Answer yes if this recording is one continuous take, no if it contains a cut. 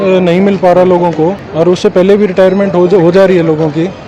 yes